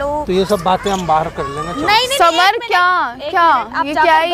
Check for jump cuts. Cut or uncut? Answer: uncut